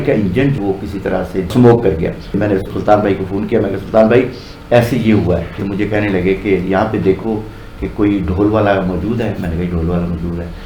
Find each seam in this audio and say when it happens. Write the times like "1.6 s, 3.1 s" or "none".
2.2 s, 5.6 s